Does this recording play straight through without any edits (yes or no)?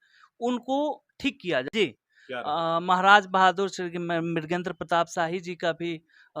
no